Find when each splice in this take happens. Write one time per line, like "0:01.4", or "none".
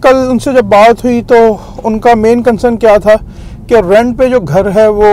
none